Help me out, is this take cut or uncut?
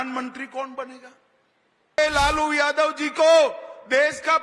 cut